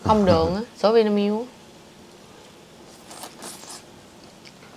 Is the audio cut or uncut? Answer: uncut